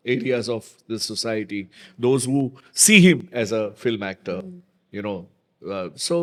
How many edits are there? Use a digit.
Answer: 0